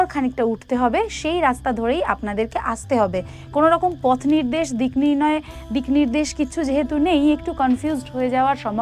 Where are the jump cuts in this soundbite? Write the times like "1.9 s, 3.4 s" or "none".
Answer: none